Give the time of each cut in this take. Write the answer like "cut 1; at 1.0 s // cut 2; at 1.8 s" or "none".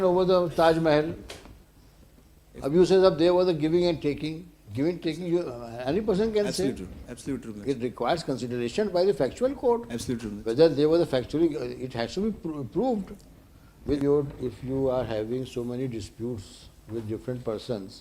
cut 1; at 14.0 s